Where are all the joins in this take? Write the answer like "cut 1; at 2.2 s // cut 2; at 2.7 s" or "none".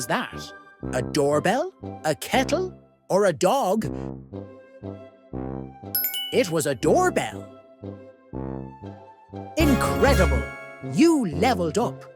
none